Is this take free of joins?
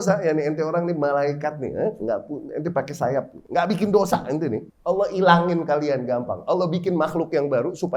no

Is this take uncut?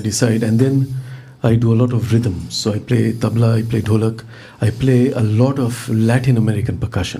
yes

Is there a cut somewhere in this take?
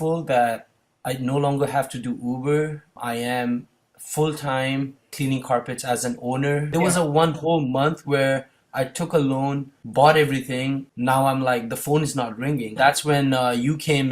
yes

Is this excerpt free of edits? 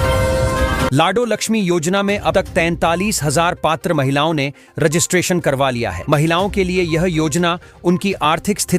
no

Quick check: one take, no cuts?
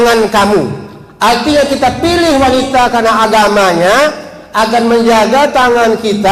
yes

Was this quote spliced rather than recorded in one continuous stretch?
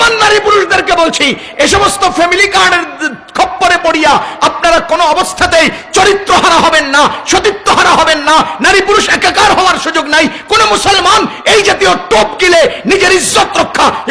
no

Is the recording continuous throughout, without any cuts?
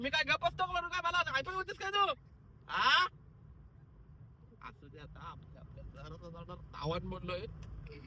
yes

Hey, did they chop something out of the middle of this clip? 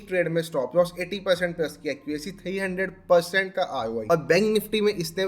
yes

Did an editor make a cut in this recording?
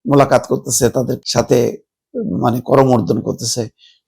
yes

